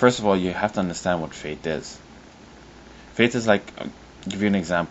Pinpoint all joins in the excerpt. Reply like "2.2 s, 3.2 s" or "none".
0.9 s